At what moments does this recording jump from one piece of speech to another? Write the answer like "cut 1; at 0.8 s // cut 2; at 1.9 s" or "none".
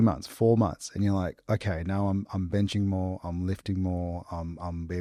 none

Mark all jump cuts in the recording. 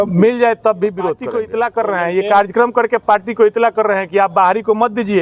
cut 1; at 1.3 s

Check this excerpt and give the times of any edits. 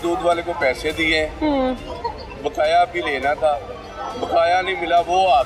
none

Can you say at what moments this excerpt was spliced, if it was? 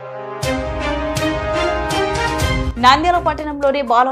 cut 1; at 2.6 s

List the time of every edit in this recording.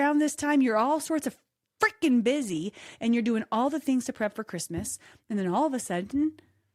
none

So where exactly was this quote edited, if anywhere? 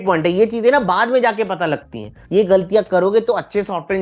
cut 1; at 2.2 s

